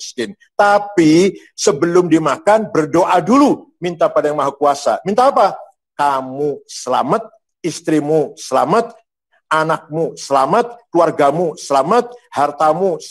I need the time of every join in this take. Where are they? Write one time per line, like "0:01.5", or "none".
none